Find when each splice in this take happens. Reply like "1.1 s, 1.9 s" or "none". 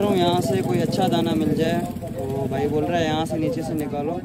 none